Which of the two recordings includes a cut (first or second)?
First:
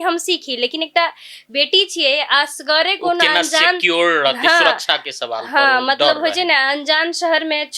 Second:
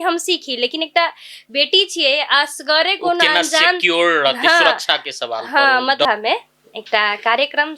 second